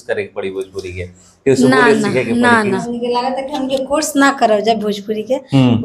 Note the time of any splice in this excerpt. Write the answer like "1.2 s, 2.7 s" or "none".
2.8 s